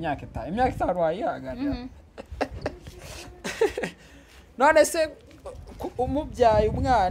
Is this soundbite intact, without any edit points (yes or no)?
yes